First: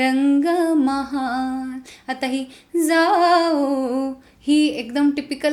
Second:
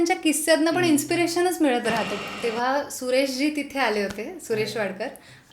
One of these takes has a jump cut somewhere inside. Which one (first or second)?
second